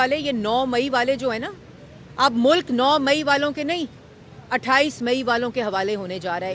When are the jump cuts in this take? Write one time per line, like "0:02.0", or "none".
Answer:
none